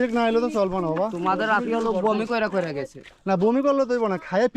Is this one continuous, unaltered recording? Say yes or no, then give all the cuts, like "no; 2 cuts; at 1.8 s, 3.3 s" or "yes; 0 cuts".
yes; 0 cuts